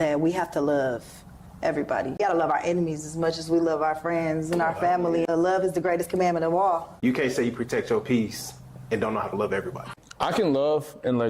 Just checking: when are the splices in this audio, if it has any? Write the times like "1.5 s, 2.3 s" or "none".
2.2 s, 5.3 s, 6.9 s, 9.9 s